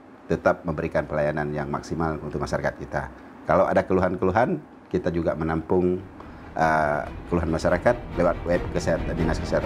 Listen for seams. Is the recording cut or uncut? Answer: uncut